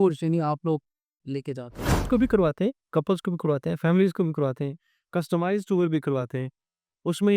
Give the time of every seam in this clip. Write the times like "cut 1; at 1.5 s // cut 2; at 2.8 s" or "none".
cut 1; at 2.1 s